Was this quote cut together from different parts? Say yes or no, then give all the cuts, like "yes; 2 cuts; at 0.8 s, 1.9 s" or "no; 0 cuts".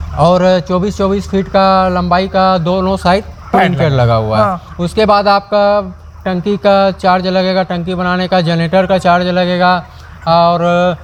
no; 0 cuts